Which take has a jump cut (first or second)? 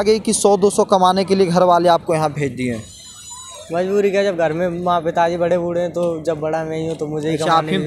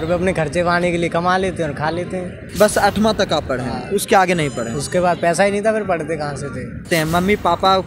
second